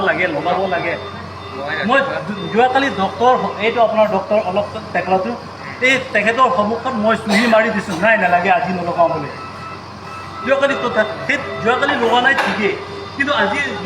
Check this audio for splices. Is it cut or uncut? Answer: uncut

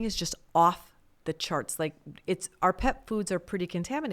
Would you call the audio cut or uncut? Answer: uncut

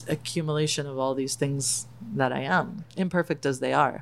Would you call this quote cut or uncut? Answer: cut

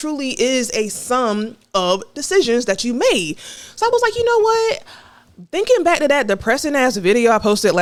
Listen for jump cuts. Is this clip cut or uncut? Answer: uncut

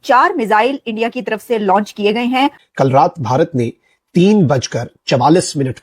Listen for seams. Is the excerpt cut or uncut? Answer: cut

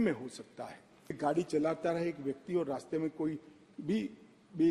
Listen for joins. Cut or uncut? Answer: cut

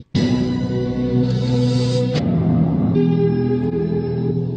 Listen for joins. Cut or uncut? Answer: uncut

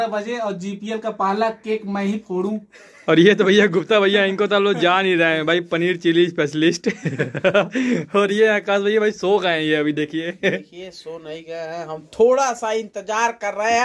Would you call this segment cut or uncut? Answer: uncut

